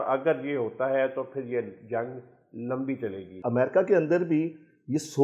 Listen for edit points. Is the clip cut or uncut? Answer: cut